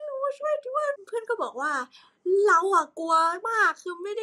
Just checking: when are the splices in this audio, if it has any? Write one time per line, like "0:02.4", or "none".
0:01.0